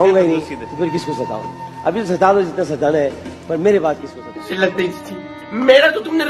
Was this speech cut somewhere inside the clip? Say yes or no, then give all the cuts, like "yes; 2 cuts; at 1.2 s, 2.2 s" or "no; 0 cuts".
yes; 1 cut; at 4.2 s